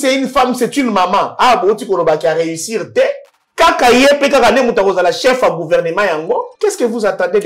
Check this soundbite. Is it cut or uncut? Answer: cut